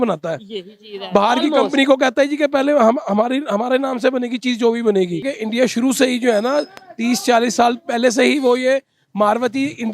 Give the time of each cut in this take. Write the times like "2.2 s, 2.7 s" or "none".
5.3 s